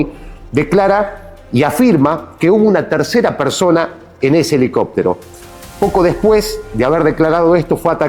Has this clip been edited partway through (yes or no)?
no